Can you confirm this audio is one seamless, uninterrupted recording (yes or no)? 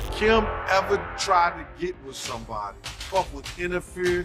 no